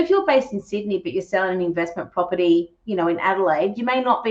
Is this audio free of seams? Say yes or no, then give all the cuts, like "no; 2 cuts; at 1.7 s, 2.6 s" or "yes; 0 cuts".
yes; 0 cuts